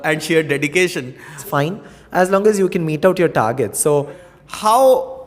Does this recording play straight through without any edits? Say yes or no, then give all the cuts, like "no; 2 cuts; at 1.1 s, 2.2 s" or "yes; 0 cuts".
no; 2 cuts; at 1.5 s, 4.2 s